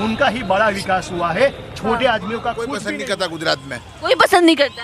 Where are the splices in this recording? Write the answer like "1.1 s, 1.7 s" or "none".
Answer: 2.8 s

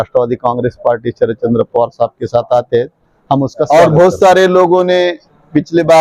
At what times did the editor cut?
3.7 s

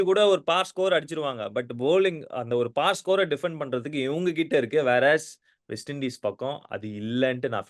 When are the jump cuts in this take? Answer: none

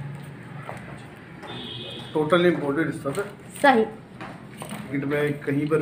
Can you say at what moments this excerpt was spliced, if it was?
4.9 s

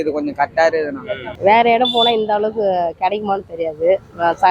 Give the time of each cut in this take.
1.3 s

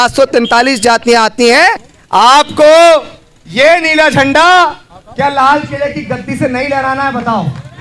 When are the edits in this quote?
1.9 s

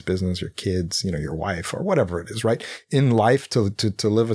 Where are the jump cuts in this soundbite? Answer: none

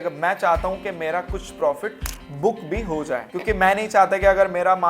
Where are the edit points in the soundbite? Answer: 3.3 s

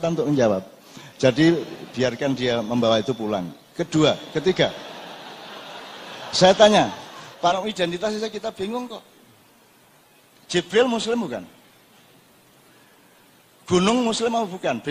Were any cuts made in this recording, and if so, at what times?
7.5 s

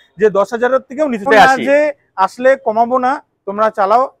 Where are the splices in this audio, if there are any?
1.2 s

